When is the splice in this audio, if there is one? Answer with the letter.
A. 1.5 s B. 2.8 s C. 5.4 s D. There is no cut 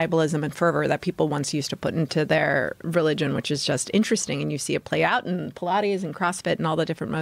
B